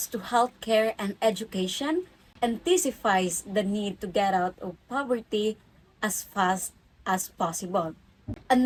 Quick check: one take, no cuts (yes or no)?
yes